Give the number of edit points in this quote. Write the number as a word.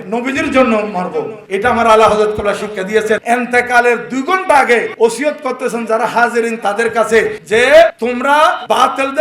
five